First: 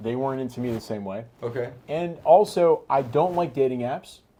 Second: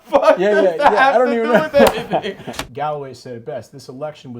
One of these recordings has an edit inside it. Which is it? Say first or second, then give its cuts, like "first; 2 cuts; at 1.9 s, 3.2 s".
second; 1 cut; at 2.5 s